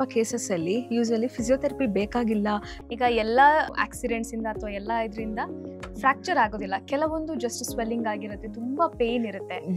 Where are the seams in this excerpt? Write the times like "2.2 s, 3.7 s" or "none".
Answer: 2.7 s, 3.7 s